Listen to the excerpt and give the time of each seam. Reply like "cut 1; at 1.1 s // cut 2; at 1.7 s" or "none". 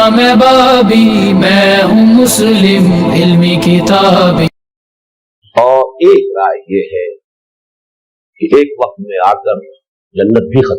cut 1; at 5.4 s